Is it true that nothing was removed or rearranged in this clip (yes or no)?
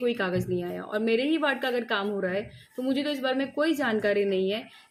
yes